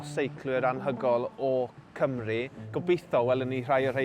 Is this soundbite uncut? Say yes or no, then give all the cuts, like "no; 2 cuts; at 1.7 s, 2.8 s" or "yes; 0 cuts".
no; 1 cut; at 2.6 s